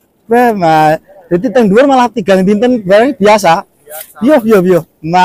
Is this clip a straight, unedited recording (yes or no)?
yes